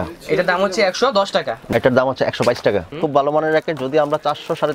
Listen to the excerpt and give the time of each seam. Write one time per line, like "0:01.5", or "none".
0:01.6
0:02.9